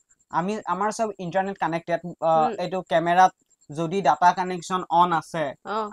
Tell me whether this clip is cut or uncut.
uncut